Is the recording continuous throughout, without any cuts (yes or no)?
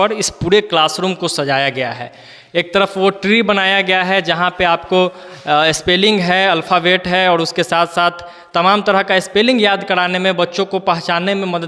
yes